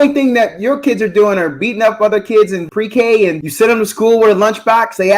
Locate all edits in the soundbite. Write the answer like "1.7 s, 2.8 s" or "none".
2.6 s, 3.4 s